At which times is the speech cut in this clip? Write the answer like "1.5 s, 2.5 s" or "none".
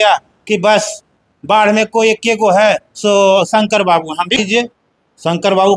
4.4 s

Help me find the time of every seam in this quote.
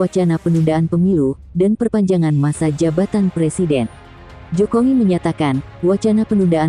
4.4 s

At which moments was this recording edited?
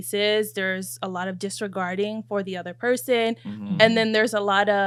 none

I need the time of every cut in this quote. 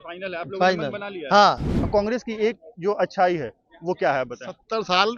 1.7 s

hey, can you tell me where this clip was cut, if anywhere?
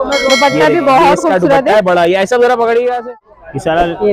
3.0 s

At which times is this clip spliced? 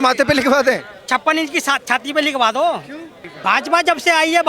3.3 s

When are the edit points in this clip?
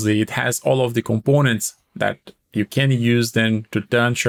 none

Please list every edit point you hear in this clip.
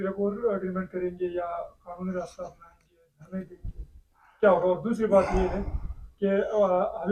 none

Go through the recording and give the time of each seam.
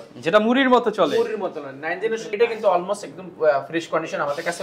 2.3 s

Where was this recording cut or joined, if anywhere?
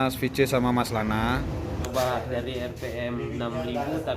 1.9 s

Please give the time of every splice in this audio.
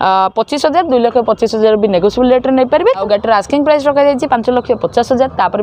3.0 s

